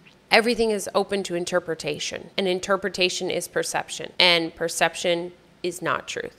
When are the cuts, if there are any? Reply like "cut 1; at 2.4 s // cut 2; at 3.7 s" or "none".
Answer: cut 1; at 2.2 s